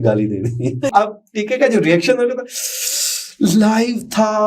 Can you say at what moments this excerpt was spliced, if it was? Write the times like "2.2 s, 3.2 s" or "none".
0.9 s